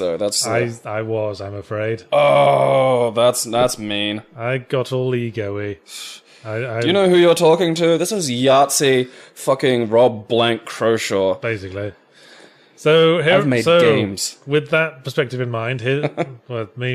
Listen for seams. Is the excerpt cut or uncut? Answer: uncut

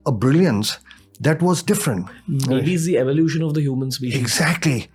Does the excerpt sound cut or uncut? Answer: uncut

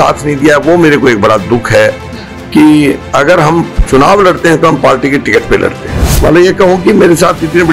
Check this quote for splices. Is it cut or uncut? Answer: cut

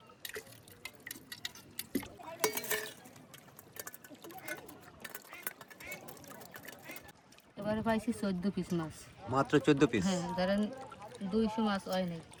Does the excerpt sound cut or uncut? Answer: uncut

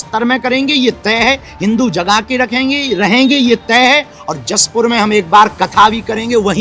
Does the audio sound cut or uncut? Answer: uncut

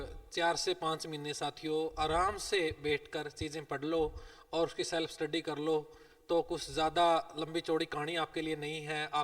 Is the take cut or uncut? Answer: uncut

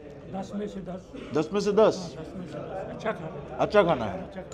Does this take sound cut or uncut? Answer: uncut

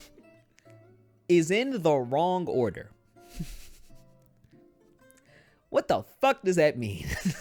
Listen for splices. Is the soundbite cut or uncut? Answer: uncut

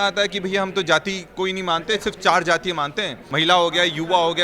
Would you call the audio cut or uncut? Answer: cut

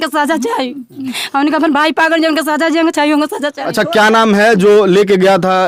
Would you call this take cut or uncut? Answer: uncut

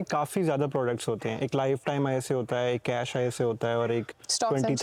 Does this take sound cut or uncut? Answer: uncut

